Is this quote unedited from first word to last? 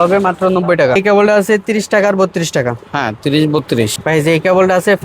no; 2 cuts; at 1.0 s, 4.0 s

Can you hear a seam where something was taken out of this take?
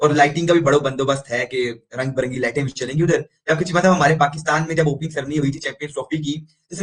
no; 0 cuts

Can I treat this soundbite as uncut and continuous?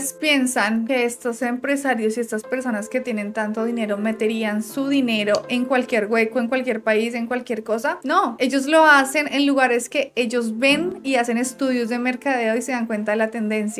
yes; 0 cuts

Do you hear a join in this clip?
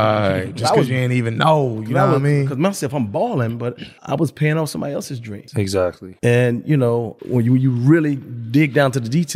yes; 3 cuts; at 3.9 s, 5.7 s, 7.2 s

